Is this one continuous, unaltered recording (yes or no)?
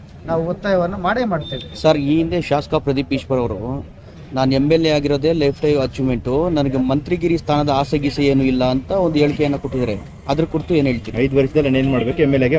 yes